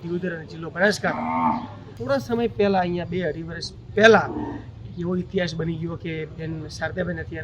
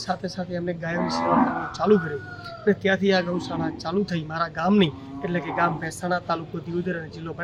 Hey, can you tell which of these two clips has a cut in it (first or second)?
first